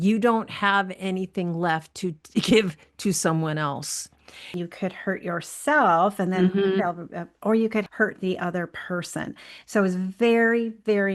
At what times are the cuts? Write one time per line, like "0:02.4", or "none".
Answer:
0:04.5
0:07.9